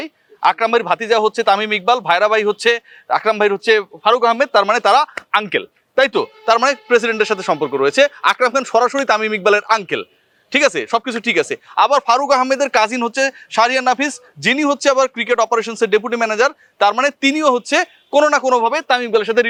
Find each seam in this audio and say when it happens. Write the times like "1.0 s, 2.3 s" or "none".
none

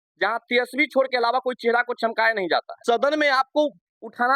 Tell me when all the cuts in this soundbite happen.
2.7 s

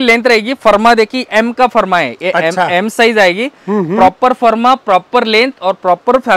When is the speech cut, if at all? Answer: none

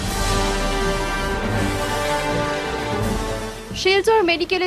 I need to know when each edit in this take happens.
2.2 s

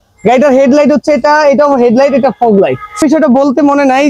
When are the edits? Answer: 3.0 s

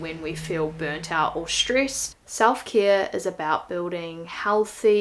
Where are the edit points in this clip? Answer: 2.3 s

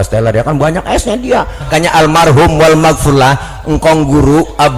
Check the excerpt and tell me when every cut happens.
1.7 s

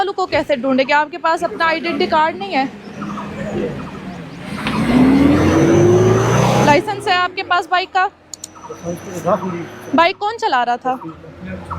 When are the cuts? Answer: none

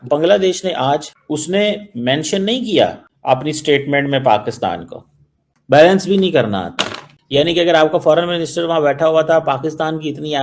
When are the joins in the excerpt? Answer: 1.1 s

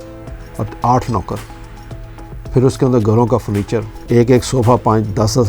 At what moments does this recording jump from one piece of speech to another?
3.9 s

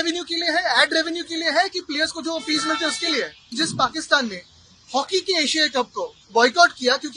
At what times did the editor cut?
3.5 s

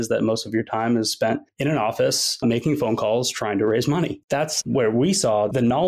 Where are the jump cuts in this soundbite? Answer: 4.2 s

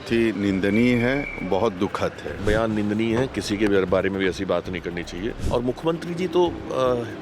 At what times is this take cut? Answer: 2.3 s, 5.4 s

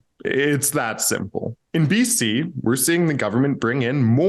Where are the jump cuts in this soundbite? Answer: 1.6 s

